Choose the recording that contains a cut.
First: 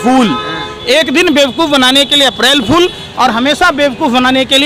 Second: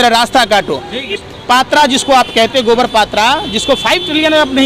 second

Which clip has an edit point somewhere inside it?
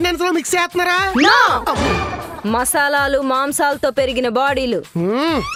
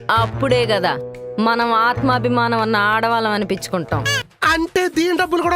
second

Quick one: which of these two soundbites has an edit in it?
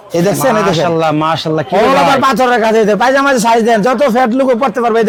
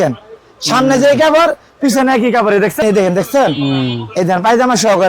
second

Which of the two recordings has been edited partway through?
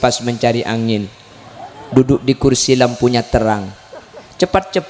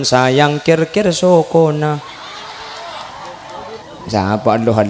second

